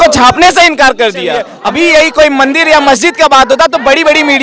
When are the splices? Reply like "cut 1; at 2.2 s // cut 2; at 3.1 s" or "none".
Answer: cut 1; at 1.5 s